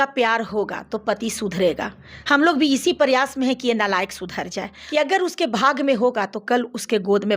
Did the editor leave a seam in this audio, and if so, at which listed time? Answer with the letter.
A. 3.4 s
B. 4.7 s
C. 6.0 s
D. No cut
B